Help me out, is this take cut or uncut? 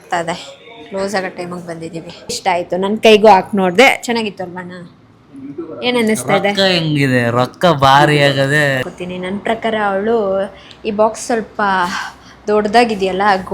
cut